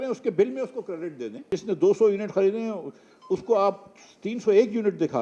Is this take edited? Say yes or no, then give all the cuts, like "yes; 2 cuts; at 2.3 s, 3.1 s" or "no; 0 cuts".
yes; 1 cut; at 1.5 s